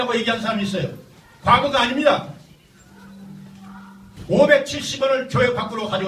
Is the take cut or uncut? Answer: uncut